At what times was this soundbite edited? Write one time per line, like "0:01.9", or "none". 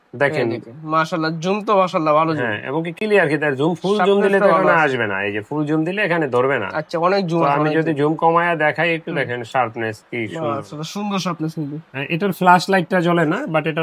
none